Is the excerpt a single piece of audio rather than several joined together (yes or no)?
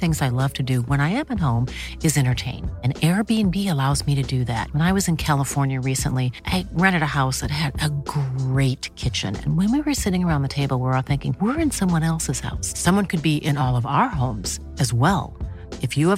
yes